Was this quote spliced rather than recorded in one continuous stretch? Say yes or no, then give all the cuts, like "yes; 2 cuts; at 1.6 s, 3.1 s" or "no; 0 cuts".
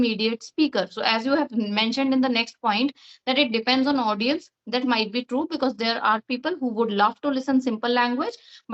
no; 0 cuts